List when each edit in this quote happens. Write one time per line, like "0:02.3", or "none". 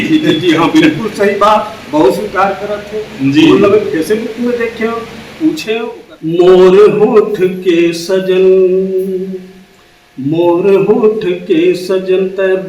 0:05.9